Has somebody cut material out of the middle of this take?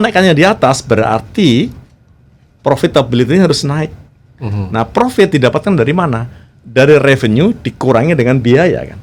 no; 0 cuts

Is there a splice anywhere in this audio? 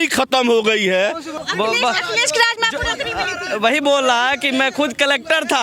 yes; 1 cut; at 1.3 s

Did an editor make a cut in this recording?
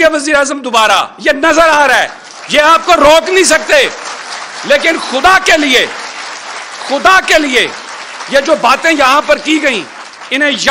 no; 0 cuts

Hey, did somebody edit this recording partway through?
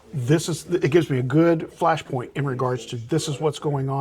yes; 1 cut; at 1.7 s

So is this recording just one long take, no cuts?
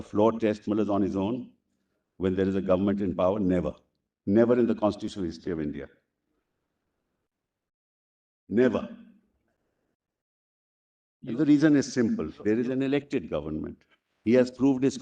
yes; 0 cuts

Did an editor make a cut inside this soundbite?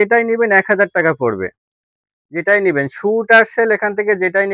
no; 0 cuts

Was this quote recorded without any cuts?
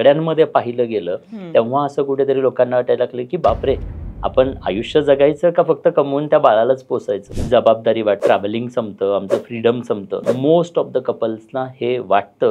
no; 3 cuts; at 7.3 s, 8.2 s, 10.2 s

